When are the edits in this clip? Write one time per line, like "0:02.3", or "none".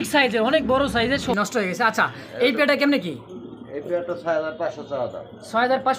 0:01.3